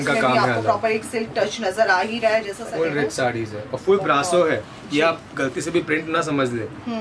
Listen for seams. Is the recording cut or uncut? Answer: cut